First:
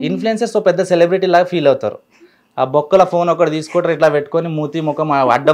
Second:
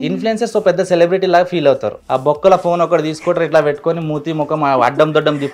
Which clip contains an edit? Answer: second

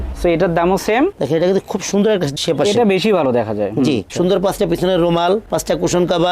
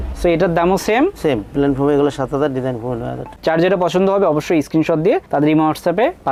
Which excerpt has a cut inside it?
first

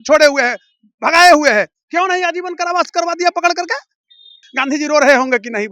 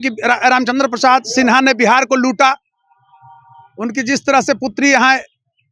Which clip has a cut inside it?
first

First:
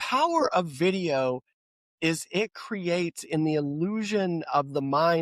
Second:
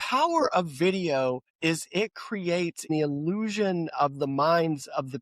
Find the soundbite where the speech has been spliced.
second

